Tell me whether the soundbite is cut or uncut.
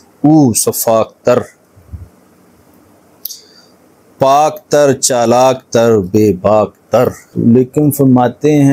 cut